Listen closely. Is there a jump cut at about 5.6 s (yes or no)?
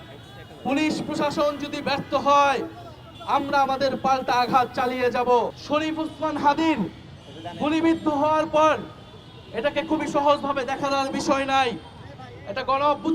yes